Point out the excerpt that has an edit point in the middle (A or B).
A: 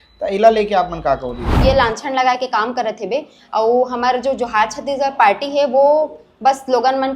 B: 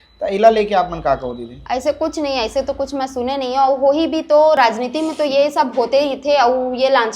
A